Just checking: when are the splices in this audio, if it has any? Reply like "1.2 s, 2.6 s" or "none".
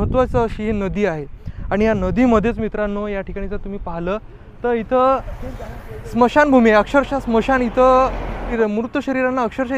8.5 s